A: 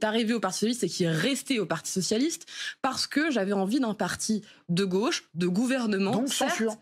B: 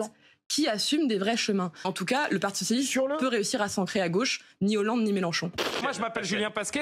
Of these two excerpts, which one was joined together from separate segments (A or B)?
B